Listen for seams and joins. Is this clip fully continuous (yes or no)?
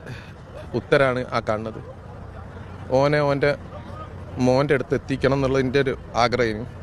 yes